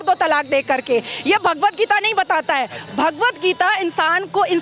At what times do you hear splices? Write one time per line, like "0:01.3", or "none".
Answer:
none

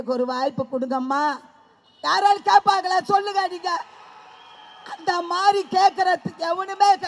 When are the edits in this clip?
none

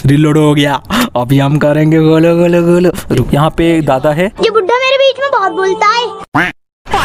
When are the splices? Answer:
0:03.2

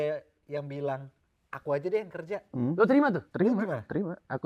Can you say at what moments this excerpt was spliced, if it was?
none

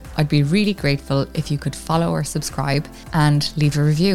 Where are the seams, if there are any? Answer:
0:03.0

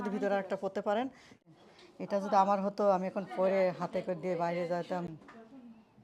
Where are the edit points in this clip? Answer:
0:01.4
0:05.1

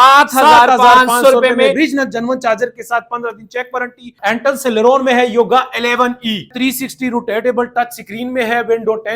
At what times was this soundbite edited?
0:04.1
0:06.5

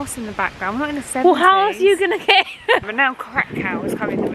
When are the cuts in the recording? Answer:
0:02.9

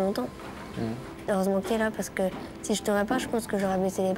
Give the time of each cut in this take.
0:01.1

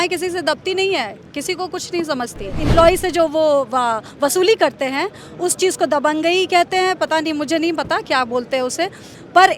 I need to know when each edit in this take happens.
0:02.6

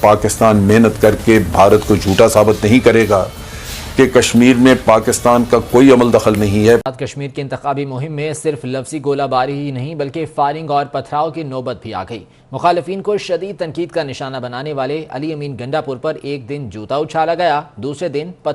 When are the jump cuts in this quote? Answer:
0:06.8

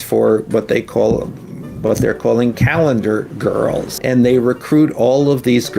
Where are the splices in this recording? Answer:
0:03.9

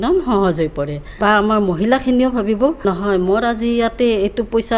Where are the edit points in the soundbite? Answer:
0:01.0
0:02.8

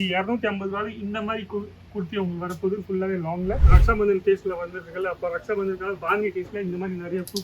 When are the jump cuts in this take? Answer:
0:03.7

